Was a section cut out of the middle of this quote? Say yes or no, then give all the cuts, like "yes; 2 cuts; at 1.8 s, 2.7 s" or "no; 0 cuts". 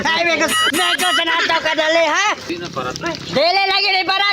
yes; 1 cut; at 2.5 s